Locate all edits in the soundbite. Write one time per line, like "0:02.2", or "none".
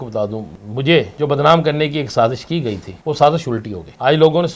0:01.1
0:02.9